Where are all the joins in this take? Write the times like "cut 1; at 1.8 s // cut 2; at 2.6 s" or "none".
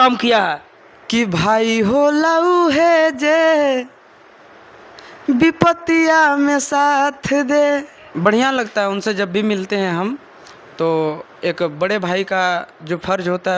cut 1; at 8.1 s